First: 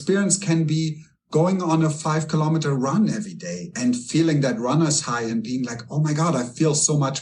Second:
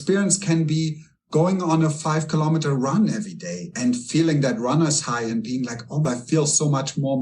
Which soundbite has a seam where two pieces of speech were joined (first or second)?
second